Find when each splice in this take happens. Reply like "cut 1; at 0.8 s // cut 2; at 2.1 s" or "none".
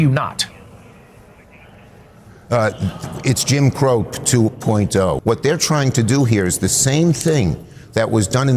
cut 1; at 5.2 s